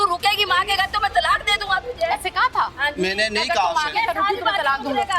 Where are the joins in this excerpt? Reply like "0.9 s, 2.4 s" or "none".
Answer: none